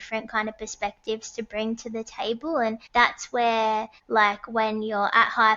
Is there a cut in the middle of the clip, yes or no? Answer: yes